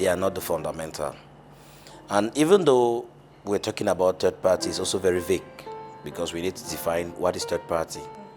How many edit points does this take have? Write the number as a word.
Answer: zero